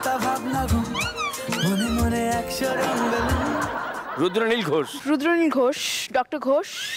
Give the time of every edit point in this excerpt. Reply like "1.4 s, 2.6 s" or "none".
4.0 s, 4.9 s